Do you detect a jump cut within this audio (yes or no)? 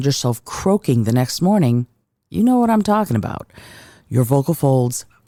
no